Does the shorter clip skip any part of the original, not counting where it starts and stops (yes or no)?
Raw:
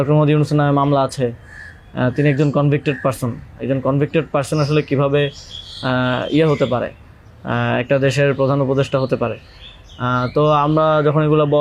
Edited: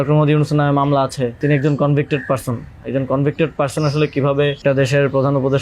yes